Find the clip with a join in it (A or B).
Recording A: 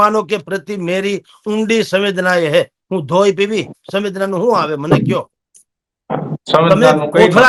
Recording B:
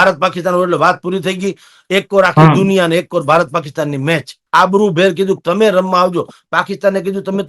B